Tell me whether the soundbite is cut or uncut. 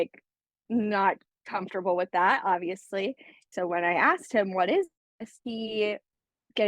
cut